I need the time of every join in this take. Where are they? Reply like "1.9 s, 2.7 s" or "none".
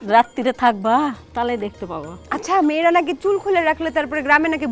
1.2 s, 2.1 s

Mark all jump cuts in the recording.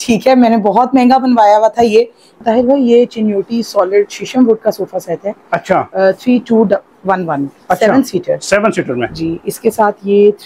2.4 s

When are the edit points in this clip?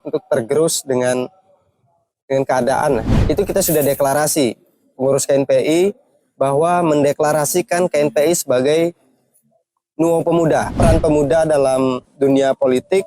3.1 s, 10.7 s

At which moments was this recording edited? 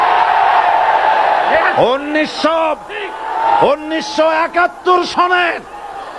none

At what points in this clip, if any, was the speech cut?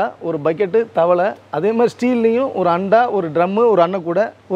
none

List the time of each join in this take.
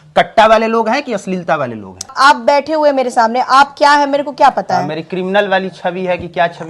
2.1 s

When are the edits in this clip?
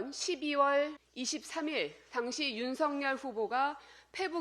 1.0 s

